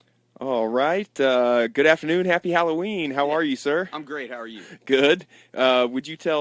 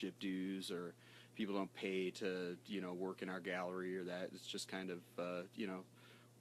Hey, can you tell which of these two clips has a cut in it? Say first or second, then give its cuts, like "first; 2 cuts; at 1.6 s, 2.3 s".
second; 1 cut; at 5.3 s